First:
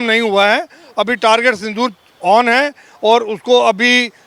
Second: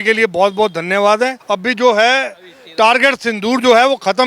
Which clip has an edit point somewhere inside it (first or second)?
second